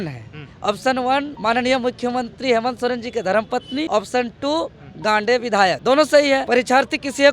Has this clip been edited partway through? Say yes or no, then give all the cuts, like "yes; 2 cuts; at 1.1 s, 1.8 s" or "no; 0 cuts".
no; 0 cuts